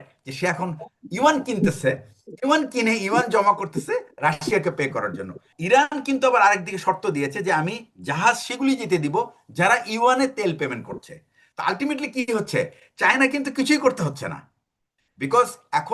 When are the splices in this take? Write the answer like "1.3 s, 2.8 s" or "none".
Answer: 5.5 s